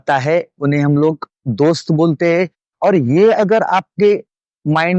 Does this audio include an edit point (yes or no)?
no